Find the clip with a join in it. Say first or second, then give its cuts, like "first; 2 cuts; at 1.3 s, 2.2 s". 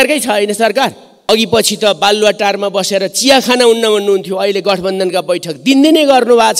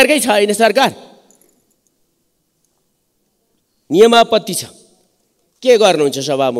first; 1 cut; at 1.2 s